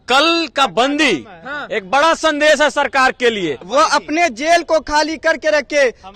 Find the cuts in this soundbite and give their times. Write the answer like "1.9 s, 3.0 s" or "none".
3.6 s